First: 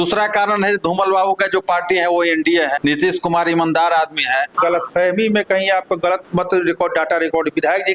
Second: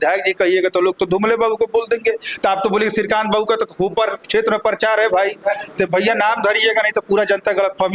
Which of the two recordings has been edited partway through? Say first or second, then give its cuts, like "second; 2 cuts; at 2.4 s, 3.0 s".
first; 2 cuts; at 2.8 s, 4.5 s